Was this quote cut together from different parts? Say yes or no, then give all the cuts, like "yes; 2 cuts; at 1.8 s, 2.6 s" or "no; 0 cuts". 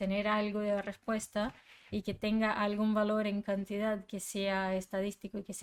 no; 0 cuts